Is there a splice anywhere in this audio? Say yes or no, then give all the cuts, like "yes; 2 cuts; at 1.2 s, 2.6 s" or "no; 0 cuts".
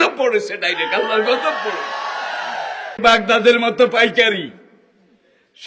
yes; 1 cut; at 3.0 s